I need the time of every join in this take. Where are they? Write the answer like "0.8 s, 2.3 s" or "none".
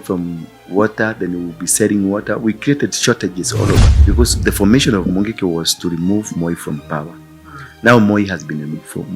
3.9 s